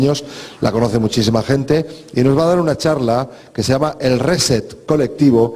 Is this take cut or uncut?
cut